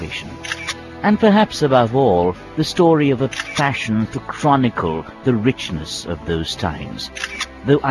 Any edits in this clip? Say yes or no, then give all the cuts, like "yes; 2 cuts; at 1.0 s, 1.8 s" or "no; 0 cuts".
no; 0 cuts